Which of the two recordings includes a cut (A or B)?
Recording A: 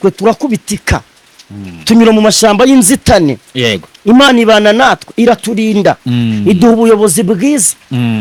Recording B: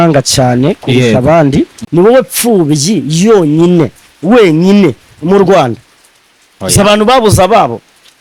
B